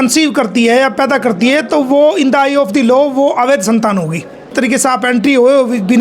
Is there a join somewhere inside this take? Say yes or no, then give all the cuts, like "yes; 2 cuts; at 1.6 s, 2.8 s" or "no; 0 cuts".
yes; 1 cut; at 4.5 s